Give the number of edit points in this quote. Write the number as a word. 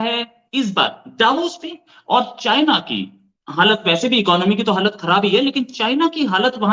zero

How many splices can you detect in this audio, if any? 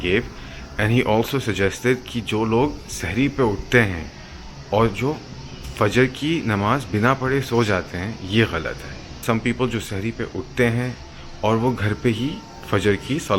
one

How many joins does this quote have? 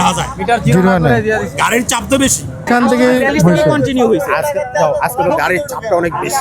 one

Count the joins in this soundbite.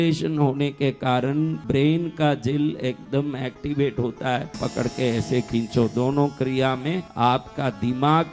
three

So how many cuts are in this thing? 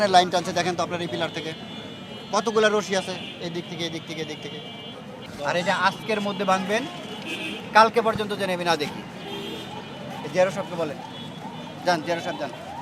zero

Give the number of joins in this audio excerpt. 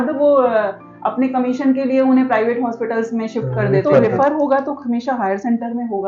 one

